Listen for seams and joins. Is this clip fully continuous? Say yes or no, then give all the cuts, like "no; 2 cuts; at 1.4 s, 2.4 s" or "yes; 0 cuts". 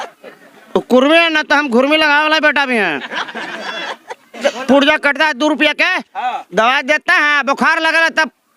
no; 1 cut; at 4.4 s